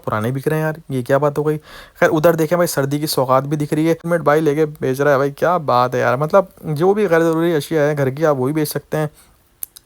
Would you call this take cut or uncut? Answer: cut